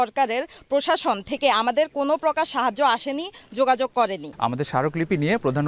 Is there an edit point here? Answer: yes; 1 cut; at 4.3 s

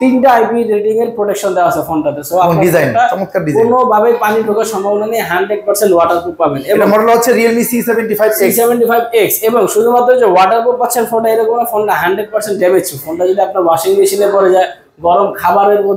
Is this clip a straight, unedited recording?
yes; 0 cuts

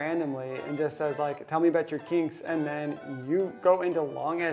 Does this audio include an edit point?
no; 0 cuts

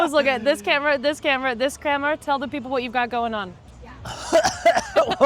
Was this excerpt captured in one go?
yes; 0 cuts

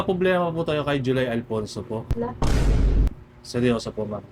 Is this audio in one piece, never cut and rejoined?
no; 2 cuts; at 2.4 s, 3.1 s

